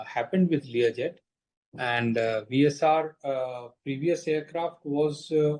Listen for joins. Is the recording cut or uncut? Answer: uncut